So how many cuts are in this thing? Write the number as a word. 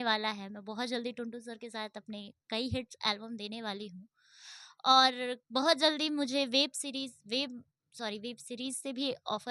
zero